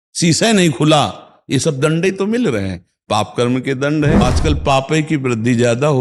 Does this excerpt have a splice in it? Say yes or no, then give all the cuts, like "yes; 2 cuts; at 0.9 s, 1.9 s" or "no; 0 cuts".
yes; 1 cut; at 4.2 s